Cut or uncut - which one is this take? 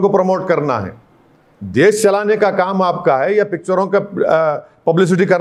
uncut